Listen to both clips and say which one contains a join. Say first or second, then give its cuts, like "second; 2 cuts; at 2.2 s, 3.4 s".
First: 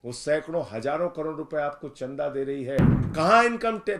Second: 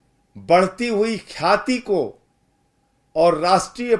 first; 1 cut; at 3.0 s